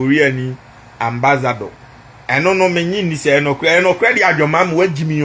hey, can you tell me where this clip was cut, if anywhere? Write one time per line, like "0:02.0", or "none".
none